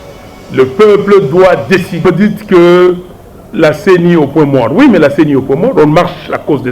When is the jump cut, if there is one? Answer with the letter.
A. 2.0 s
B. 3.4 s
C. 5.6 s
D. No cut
A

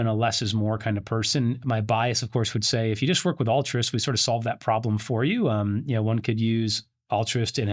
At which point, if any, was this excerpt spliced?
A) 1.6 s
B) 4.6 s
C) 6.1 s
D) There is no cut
A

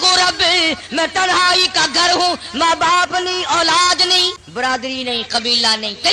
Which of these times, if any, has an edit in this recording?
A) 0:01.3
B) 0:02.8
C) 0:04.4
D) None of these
C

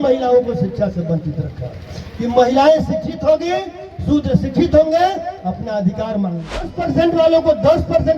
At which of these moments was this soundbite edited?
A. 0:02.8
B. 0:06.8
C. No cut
B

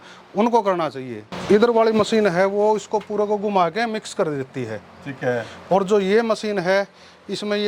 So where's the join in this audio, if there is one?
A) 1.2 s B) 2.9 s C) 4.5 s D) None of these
A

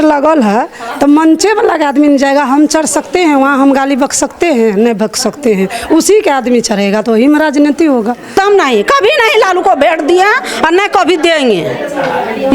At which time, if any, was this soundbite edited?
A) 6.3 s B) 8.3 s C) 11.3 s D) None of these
B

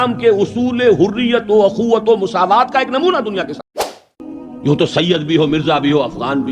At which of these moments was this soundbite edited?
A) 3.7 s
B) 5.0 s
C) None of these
A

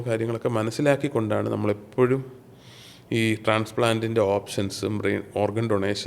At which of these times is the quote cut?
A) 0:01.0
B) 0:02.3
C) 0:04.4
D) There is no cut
D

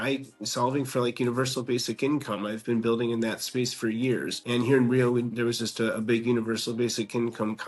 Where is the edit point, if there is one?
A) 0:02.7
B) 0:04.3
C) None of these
B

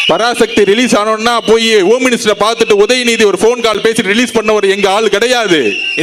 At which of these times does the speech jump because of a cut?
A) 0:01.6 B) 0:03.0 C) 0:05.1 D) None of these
D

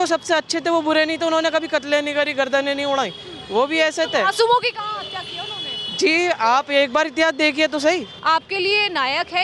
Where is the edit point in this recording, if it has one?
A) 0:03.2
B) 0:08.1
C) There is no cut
B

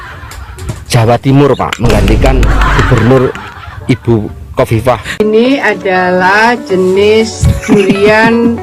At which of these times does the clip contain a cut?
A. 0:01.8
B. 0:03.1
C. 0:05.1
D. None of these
C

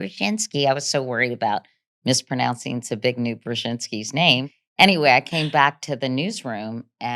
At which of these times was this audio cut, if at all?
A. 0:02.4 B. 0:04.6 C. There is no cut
B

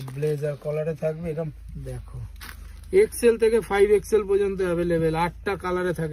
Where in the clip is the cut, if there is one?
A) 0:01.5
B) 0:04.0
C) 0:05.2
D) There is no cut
A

